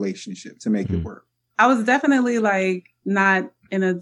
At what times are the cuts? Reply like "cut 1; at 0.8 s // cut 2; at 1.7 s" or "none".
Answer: cut 1; at 1.5 s // cut 2; at 2.9 s